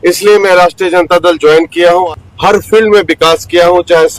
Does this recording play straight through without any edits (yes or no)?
no